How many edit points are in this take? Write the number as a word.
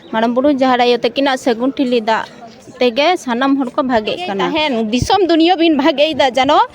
one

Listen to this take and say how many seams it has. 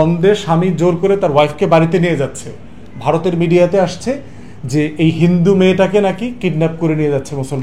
zero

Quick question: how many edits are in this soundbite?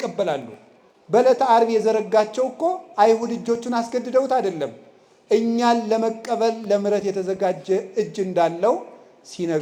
zero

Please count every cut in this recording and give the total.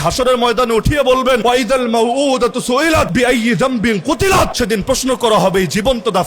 three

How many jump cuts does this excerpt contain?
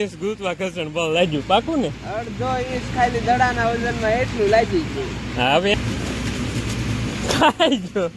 one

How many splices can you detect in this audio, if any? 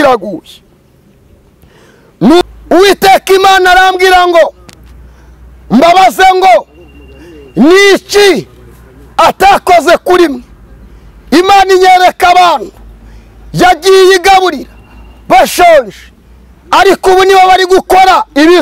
one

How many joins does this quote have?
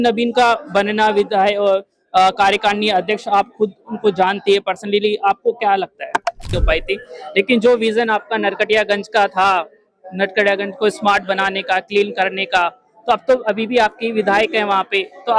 one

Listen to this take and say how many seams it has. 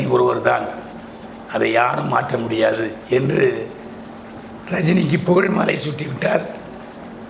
zero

